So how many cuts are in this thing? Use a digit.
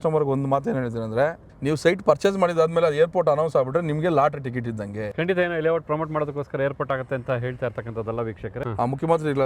3